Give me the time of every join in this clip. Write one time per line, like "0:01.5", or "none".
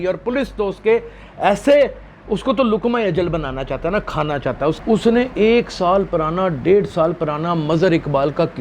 0:04.8